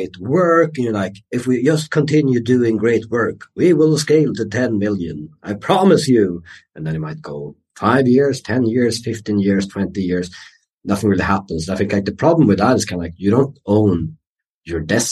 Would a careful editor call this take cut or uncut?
uncut